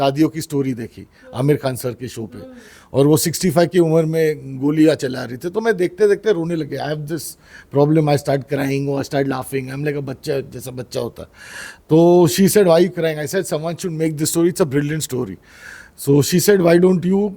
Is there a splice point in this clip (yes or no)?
no